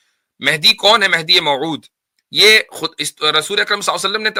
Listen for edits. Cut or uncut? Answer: uncut